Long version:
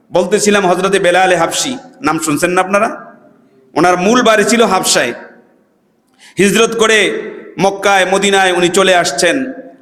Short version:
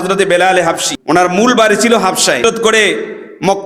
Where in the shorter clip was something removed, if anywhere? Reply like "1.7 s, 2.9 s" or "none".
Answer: 0.9 s, 2.4 s

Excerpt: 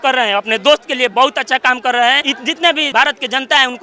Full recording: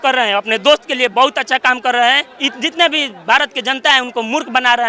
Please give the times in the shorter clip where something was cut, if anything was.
2.7 s

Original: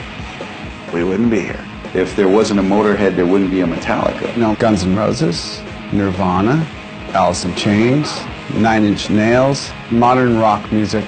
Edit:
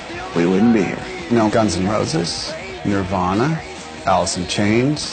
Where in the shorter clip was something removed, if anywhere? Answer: 1.4 s

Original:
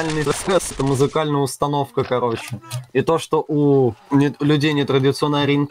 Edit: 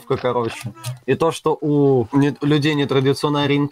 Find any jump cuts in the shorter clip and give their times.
2.1 s

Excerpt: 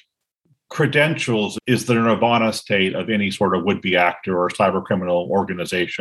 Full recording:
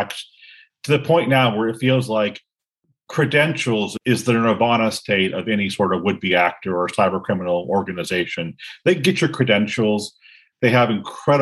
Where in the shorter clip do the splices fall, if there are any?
none

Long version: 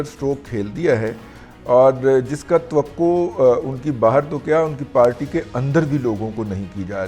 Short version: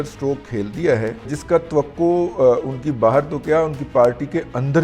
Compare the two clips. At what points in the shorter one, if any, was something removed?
1.3 s

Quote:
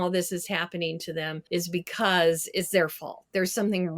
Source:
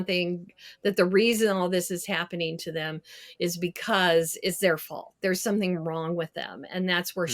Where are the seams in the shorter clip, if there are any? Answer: 1.4 s

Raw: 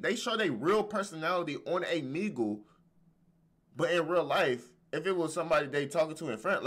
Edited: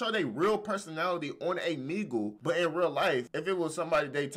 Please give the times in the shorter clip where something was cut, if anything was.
2.4 s, 3.3 s

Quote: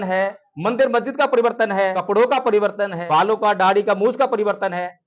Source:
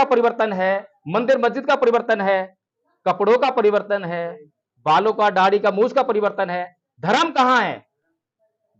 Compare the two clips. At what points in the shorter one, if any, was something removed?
2.0 s, 3.0 s

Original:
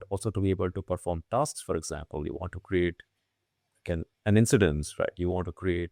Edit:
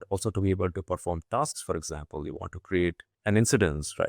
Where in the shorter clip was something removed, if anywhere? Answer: 3.1 s

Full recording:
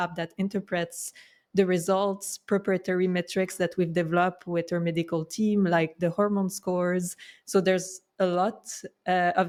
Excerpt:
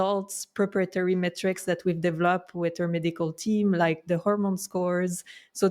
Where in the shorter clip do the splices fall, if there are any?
none

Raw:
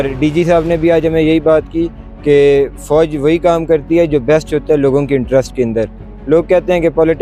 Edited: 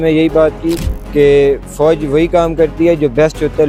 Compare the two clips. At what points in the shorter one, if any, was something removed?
none

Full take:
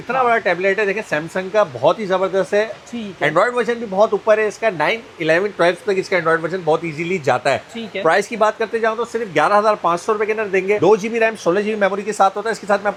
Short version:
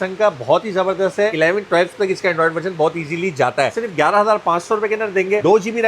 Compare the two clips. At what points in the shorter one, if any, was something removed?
1.3 s, 3.8 s

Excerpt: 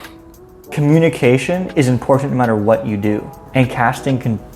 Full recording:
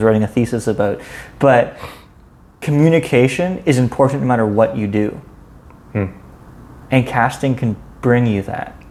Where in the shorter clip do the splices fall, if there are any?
3.4 s

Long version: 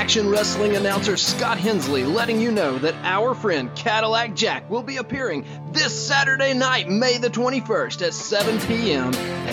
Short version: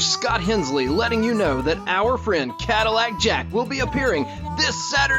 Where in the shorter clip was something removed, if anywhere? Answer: none

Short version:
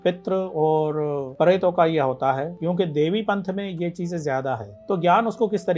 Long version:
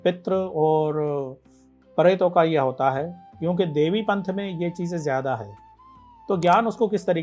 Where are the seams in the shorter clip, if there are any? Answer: 1.3 s, 2.5 s, 4.7 s

